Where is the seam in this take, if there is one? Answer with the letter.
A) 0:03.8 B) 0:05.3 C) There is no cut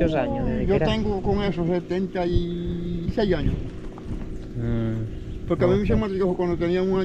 C